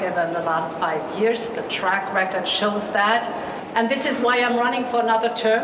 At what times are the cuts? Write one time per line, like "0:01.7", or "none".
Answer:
0:03.6